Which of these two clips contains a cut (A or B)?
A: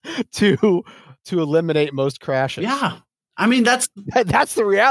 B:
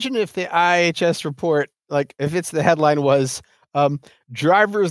A